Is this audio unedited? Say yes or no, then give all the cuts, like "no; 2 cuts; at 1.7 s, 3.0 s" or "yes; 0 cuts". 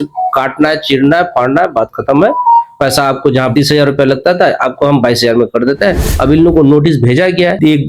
no; 2 cuts; at 3.5 s, 6.2 s